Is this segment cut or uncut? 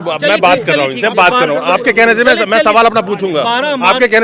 uncut